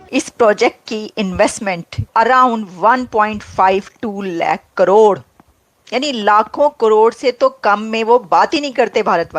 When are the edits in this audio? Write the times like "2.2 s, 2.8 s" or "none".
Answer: 2.1 s